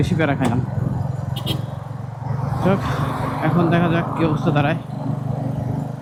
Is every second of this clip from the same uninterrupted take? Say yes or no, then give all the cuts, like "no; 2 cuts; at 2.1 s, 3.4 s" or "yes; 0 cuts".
yes; 0 cuts